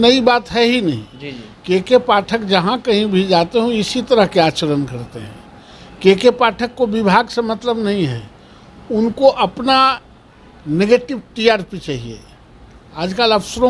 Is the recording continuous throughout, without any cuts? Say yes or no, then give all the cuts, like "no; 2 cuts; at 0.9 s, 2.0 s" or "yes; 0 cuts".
yes; 0 cuts